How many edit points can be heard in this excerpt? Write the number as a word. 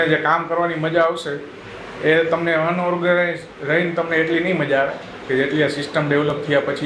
zero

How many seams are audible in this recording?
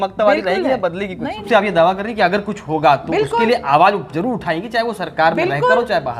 one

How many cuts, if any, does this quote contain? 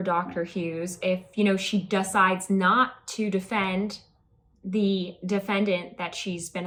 zero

